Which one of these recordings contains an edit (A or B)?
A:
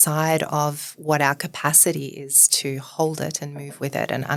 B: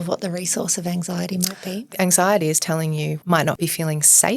B